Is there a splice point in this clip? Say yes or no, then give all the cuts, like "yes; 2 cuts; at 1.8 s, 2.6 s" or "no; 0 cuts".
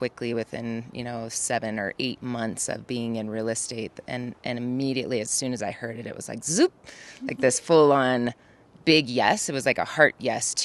no; 0 cuts